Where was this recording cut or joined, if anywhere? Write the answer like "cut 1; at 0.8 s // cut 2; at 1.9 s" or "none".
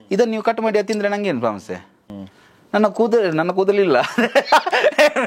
none